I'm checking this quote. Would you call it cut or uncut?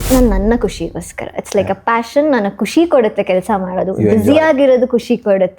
uncut